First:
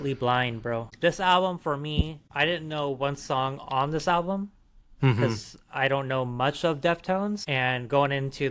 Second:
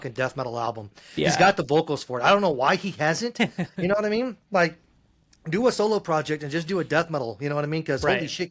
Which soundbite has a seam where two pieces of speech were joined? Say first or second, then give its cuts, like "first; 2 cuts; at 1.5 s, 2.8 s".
first; 3 cuts; at 0.9 s, 2.2 s, 7.5 s